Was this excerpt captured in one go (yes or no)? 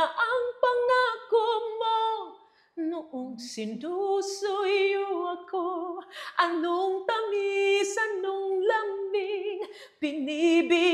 yes